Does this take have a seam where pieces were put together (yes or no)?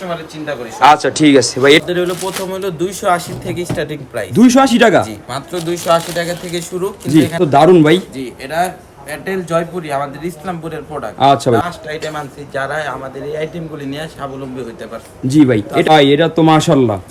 yes